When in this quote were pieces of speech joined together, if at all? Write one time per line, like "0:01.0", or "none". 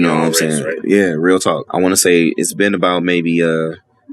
0:01.6

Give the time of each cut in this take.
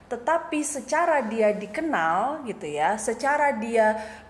none

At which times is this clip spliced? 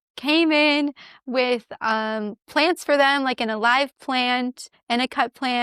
0:04.7

